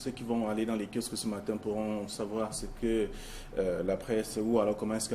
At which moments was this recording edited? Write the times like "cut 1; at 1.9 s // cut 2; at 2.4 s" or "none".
cut 1; at 2.3 s